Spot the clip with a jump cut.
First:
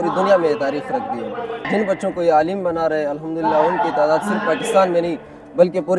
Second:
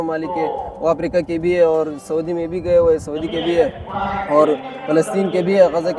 first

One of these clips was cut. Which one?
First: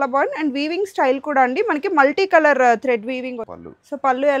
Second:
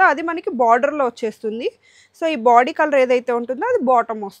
first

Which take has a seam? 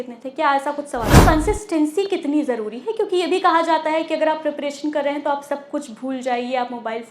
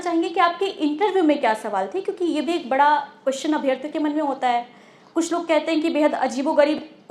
first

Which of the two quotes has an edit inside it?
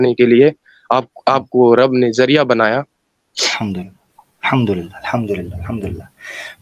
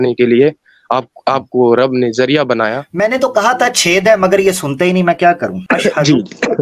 second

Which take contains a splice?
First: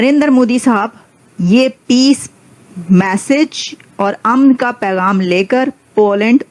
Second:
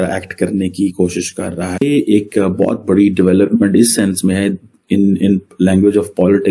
second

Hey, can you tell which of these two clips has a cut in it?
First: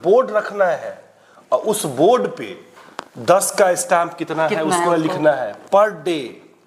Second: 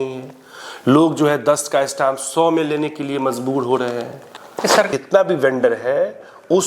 second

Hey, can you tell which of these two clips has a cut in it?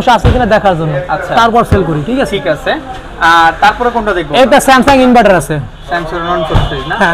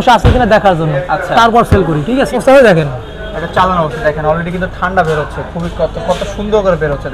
second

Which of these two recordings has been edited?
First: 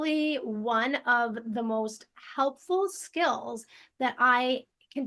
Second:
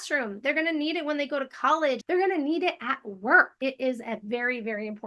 second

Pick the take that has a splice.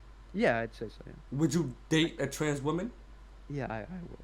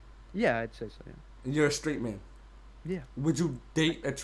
first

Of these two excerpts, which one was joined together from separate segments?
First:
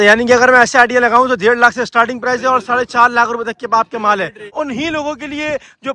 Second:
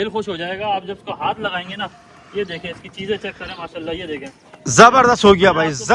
first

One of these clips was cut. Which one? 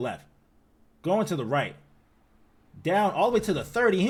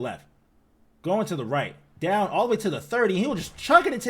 second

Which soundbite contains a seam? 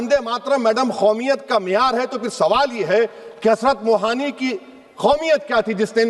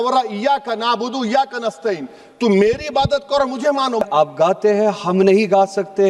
second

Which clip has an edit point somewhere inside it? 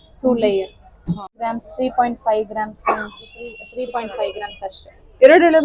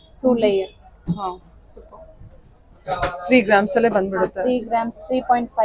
first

